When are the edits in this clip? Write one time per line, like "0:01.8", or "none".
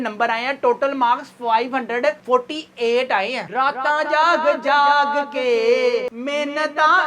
0:03.5

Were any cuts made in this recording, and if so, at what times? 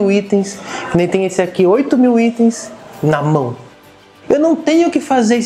0:04.1

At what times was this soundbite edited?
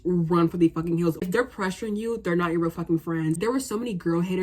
0:01.2
0:03.4

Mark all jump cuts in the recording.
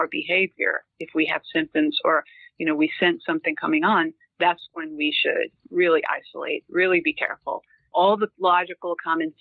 none

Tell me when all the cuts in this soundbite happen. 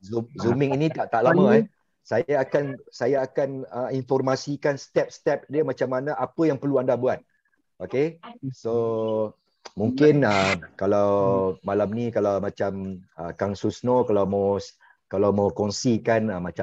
none

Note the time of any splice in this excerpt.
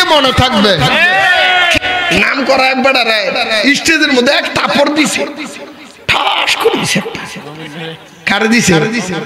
0:01.8

